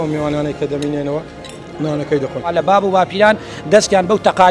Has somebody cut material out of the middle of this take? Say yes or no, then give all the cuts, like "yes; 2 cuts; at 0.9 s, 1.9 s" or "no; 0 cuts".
yes; 1 cut; at 2.5 s